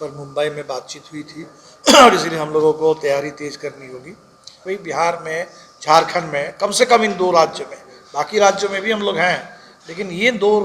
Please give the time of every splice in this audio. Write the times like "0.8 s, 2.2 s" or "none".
4.7 s